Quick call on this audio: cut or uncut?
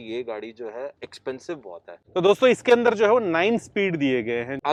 uncut